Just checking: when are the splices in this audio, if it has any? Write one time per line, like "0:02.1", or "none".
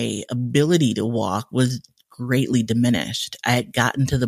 none